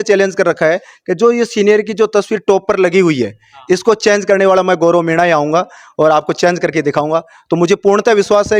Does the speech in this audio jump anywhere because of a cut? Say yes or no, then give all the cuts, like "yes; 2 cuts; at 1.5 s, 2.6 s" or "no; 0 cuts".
no; 0 cuts